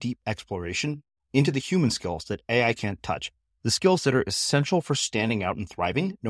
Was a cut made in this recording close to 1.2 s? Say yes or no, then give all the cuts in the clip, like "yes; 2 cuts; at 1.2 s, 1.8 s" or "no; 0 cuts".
no; 0 cuts